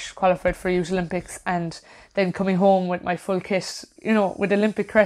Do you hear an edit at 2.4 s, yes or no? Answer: no